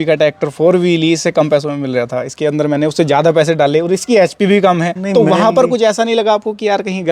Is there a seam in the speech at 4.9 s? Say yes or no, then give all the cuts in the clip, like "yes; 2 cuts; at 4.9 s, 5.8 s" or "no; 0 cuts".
yes; 1 cut; at 4.9 s